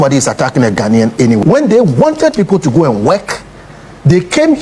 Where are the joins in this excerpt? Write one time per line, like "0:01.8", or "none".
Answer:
0:01.4